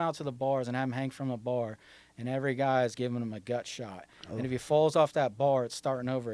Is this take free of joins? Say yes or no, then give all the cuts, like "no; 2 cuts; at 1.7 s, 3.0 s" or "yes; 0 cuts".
yes; 0 cuts